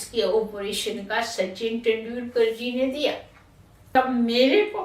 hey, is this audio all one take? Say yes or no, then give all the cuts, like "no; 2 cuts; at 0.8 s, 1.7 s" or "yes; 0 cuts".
no; 1 cut; at 3.8 s